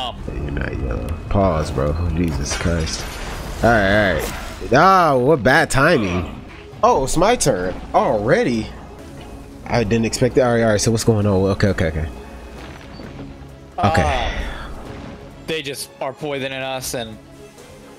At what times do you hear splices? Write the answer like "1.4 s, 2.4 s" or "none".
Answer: none